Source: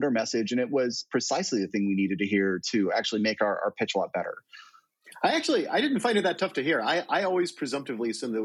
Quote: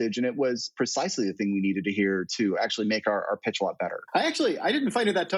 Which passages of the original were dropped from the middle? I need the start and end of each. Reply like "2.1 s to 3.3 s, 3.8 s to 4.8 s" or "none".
4.3 s to 5.1 s